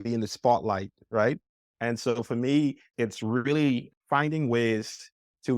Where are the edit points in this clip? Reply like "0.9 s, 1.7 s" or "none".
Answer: 2.9 s, 3.9 s